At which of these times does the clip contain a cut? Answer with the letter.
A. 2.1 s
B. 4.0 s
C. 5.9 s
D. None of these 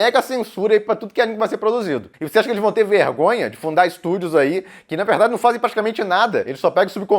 A